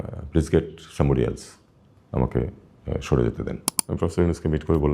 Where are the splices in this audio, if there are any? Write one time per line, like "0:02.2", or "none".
0:03.7